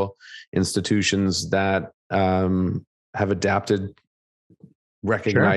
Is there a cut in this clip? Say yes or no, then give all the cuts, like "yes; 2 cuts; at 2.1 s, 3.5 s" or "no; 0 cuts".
no; 0 cuts